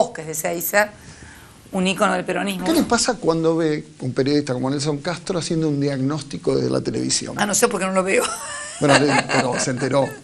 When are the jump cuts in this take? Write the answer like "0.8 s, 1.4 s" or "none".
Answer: 2.6 s